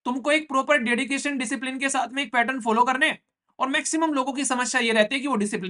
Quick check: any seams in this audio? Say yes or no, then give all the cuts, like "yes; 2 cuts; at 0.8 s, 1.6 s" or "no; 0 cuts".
no; 0 cuts